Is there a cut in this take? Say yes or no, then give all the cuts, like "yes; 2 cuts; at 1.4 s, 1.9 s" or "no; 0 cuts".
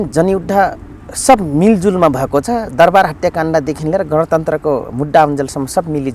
no; 0 cuts